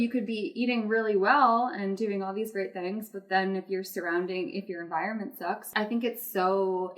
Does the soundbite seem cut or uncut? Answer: cut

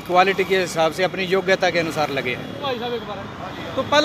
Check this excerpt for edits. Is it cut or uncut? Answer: cut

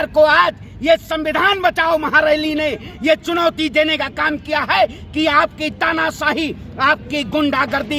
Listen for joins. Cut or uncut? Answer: uncut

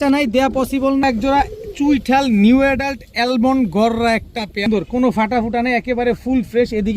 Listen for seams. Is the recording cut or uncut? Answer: cut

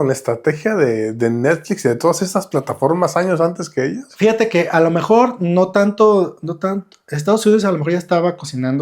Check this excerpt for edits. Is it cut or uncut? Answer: uncut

